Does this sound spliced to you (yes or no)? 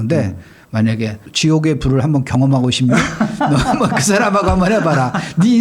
yes